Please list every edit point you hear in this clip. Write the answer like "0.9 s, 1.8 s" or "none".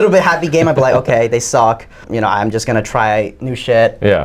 2.1 s